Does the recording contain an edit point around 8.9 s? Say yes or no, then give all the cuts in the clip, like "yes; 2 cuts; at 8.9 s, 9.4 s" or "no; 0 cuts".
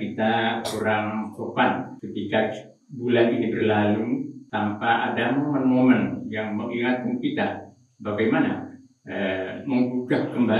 no; 2 cuts; at 2.0 s, 4.4 s